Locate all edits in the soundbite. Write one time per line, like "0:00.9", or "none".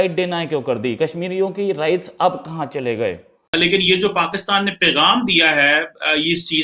0:03.3